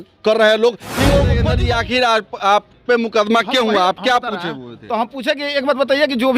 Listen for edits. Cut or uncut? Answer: cut